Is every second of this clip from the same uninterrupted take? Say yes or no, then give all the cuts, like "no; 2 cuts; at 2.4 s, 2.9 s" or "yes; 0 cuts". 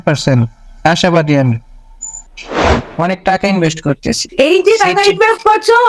no; 1 cut; at 2.7 s